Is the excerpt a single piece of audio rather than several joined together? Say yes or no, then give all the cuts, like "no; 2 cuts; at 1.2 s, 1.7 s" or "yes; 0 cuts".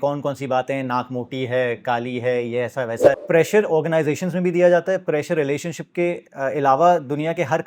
no; 1 cut; at 3.2 s